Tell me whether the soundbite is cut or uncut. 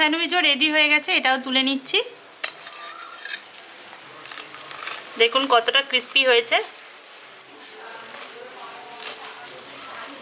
cut